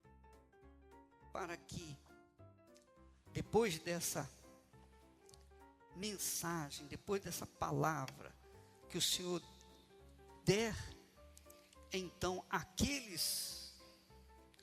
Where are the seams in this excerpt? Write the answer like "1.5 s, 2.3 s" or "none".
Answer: 1.3 s, 4.3 s, 5.9 s